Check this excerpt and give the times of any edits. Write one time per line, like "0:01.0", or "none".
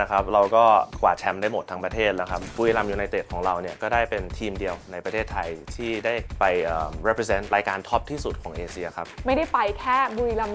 0:02.4
0:06.3
0:07.5
0:09.1